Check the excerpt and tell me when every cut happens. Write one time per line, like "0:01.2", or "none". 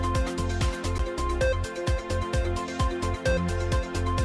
0:00.9